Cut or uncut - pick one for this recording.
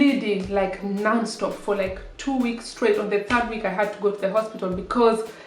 uncut